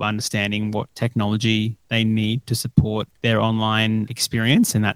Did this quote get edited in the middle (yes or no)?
yes